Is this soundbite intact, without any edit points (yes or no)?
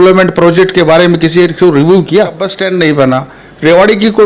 no